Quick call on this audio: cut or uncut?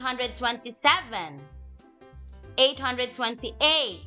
cut